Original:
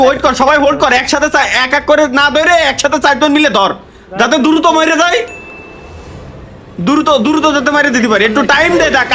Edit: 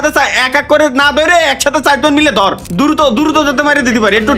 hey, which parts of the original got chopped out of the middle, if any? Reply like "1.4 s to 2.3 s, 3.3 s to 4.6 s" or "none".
3.8 s to 6.7 s